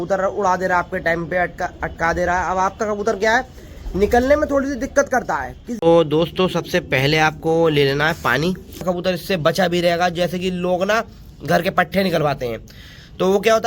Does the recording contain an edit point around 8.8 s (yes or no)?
yes